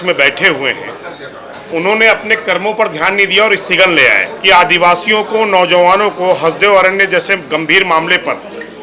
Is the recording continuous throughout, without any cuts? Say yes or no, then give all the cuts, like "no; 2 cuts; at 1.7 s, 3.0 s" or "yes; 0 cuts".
no; 1 cut; at 4.3 s